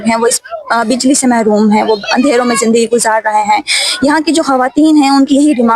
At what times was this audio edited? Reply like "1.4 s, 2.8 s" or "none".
none